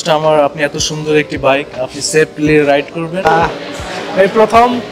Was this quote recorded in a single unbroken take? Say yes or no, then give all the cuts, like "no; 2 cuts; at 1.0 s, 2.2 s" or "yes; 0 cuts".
no; 1 cut; at 3.2 s